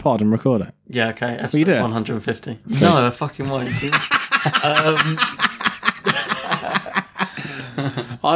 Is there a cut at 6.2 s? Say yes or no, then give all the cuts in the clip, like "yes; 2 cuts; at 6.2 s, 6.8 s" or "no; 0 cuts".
no; 0 cuts